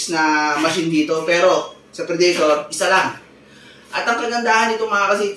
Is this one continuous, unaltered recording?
yes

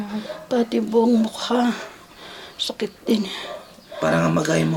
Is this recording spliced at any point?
no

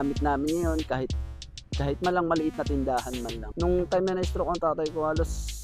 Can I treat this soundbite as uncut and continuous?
no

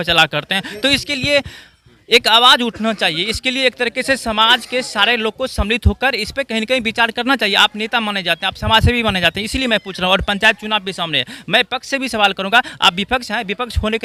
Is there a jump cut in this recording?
no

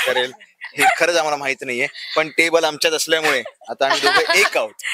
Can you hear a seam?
no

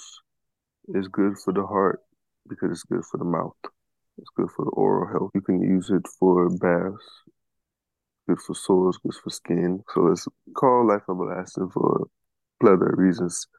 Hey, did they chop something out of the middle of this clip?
yes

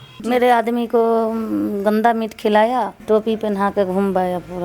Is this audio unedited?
no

